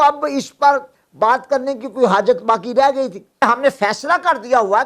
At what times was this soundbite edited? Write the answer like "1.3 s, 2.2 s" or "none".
3.4 s